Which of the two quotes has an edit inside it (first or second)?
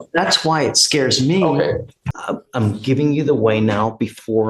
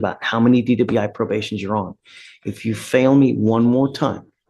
first